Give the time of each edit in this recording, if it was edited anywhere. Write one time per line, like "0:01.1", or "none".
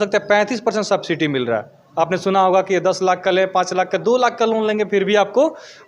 none